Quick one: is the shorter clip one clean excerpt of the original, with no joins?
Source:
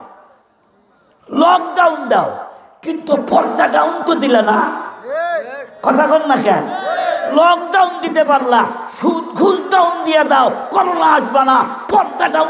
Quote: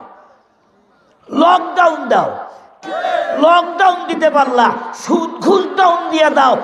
no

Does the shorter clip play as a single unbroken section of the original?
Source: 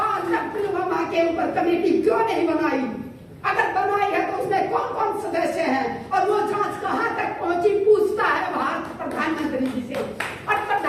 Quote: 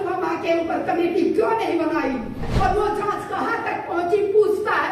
no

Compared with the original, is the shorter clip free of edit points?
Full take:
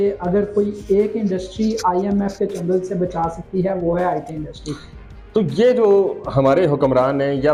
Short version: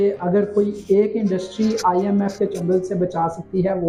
yes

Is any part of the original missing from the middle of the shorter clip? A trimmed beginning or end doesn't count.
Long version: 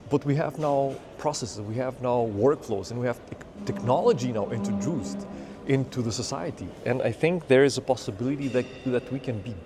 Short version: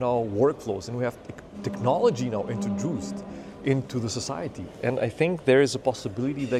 no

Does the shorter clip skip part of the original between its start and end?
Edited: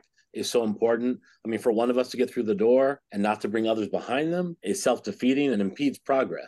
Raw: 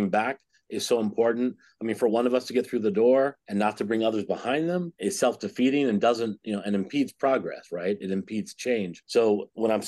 yes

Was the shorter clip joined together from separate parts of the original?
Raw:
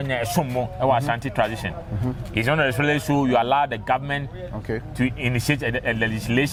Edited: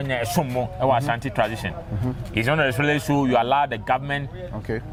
no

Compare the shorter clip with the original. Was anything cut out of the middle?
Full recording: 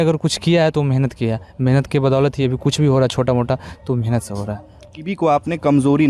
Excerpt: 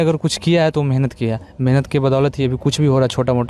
no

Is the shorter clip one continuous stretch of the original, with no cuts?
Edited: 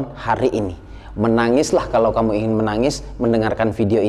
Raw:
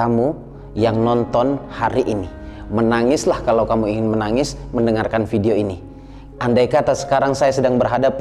yes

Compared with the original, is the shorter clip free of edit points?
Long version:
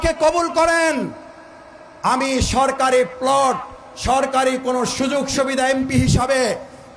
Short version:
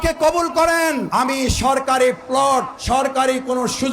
no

